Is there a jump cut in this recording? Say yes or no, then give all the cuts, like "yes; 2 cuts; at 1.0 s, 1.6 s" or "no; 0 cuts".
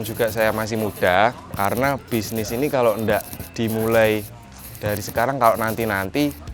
no; 0 cuts